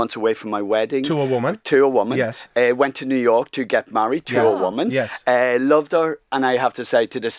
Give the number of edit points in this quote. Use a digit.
0